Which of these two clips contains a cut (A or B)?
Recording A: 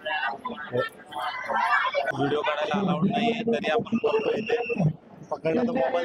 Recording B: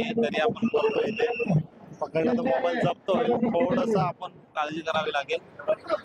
A